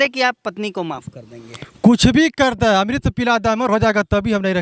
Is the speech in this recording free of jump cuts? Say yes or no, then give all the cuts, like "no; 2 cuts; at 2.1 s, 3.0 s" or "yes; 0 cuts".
yes; 0 cuts